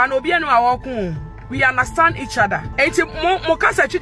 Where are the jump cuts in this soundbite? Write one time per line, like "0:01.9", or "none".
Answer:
0:02.7